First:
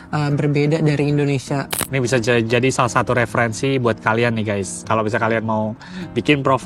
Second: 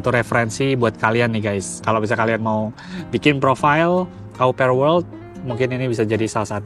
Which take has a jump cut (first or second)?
first